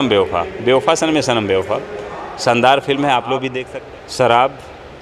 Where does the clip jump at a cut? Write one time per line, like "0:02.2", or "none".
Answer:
0:03.6